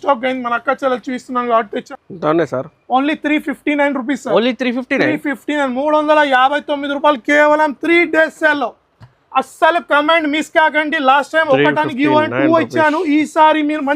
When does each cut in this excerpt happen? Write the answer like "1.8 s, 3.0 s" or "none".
1.8 s